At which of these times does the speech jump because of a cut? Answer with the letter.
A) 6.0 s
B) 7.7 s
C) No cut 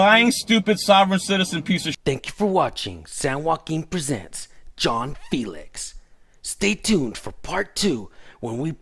C